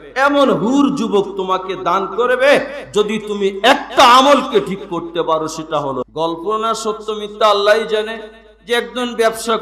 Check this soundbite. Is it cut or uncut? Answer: cut